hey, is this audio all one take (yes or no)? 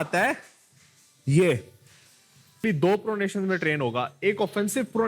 no